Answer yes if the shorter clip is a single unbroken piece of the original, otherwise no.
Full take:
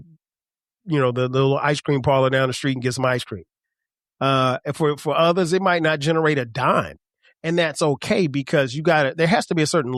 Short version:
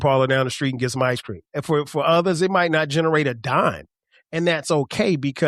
no